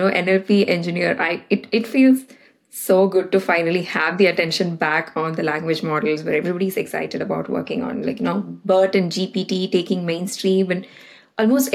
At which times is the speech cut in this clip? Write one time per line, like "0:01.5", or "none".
none